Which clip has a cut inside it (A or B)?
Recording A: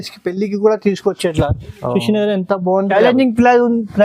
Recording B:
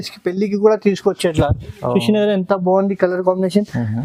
A